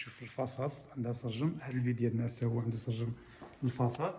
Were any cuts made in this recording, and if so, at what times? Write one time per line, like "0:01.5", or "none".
none